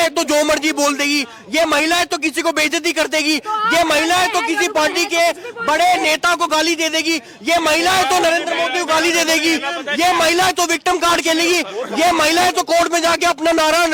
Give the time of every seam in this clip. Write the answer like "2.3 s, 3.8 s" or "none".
none